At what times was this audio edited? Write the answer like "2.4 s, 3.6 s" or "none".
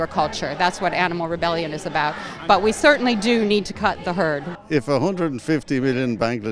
4.5 s